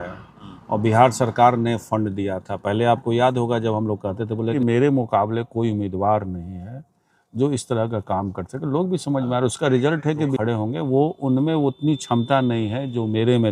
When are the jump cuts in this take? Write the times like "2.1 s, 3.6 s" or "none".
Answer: 4.5 s, 10.3 s